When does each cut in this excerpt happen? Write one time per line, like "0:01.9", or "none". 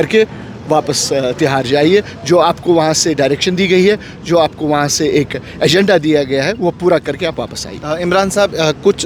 none